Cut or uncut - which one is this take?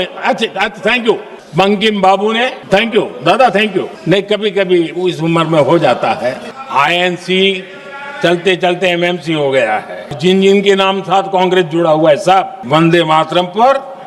cut